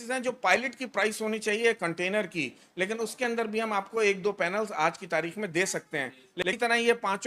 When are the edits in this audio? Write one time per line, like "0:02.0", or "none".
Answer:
0:06.3